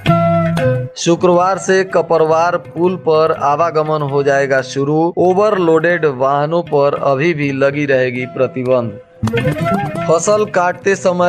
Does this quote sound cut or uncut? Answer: cut